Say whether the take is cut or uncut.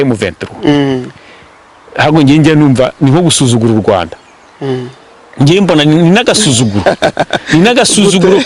uncut